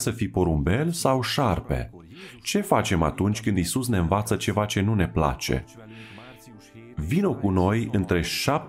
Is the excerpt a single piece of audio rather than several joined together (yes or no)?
yes